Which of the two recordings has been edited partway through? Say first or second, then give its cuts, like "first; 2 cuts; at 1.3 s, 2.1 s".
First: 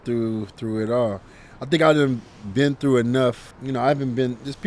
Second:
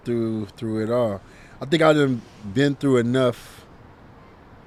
first; 1 cut; at 3.5 s